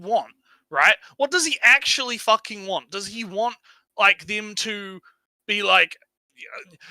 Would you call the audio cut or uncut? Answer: uncut